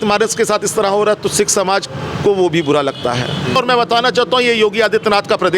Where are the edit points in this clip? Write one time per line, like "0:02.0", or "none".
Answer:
0:03.6